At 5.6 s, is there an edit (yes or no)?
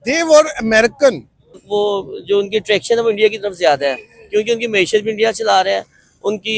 no